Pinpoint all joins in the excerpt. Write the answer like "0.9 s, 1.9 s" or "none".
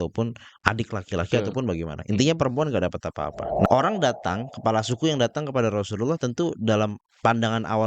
3.7 s